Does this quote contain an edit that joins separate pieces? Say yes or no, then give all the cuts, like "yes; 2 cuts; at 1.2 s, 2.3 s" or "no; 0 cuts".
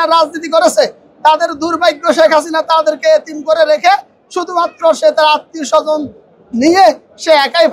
no; 0 cuts